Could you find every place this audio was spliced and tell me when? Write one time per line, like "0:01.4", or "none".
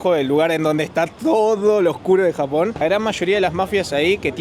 0:02.8

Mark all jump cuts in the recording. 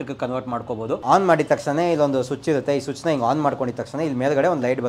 0:01.0

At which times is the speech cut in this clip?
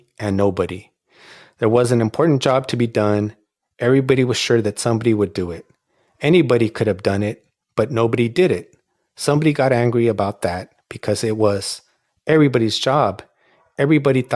none

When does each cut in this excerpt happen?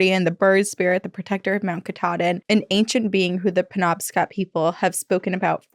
none

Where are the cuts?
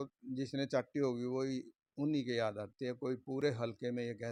none

